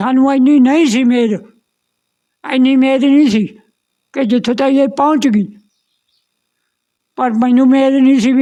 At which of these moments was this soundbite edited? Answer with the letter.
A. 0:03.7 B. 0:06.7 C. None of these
C